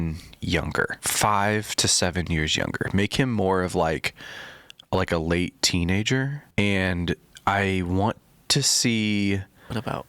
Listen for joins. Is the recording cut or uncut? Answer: cut